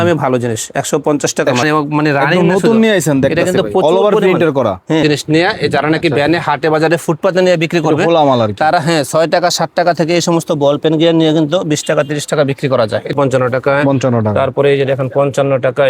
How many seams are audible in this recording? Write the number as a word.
three